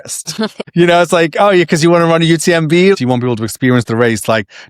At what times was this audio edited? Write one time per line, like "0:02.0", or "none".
0:02.9